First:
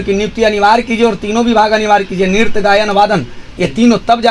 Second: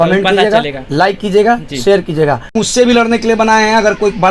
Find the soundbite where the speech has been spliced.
second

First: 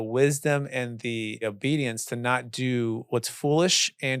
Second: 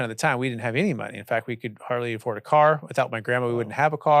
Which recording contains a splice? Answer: first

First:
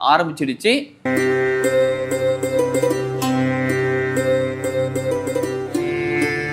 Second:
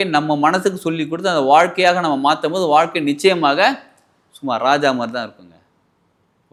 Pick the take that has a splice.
first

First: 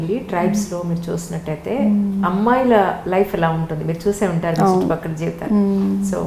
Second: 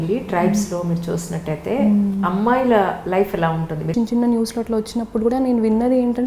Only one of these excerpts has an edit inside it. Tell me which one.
second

